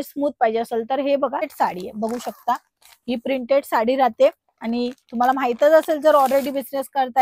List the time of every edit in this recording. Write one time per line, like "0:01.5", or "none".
0:01.5